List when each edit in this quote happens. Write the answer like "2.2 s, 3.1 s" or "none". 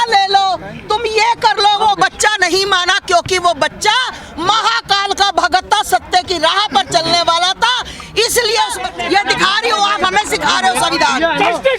8.8 s